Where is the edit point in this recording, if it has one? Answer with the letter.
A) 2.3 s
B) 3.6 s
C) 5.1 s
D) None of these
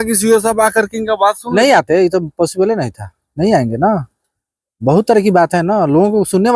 D